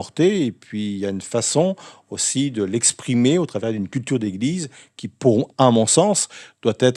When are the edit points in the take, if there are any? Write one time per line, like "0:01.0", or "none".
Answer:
none